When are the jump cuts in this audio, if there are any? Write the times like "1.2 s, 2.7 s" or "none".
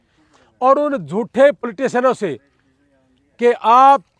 1.7 s